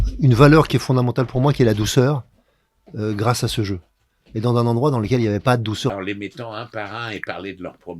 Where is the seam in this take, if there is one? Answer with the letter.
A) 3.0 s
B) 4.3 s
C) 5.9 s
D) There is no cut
C